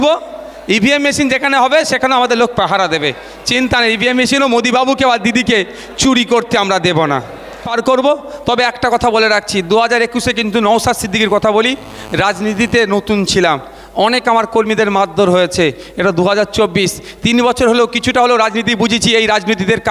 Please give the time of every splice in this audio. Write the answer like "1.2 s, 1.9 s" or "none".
7.7 s